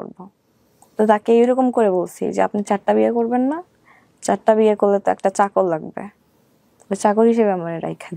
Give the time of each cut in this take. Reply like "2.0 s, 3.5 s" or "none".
none